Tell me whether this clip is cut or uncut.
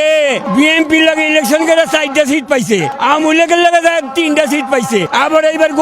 uncut